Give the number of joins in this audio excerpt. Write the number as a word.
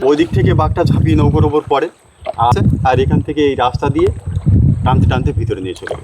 one